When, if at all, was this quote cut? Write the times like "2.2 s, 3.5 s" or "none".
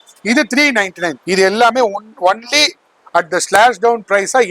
1.1 s